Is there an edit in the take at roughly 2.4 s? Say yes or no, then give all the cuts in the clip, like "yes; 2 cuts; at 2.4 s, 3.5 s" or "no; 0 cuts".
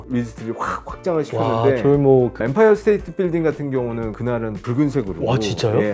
yes; 1 cut; at 2.4 s